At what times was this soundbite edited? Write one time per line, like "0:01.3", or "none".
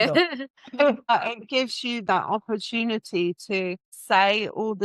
0:01.1
0:03.9